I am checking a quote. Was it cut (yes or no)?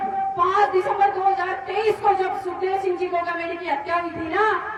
no